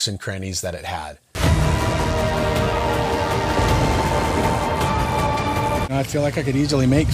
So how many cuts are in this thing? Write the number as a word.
two